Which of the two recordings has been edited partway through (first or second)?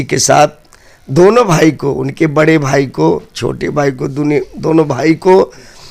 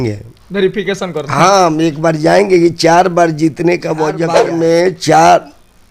second